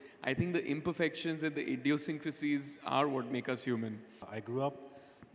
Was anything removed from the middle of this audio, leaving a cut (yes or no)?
yes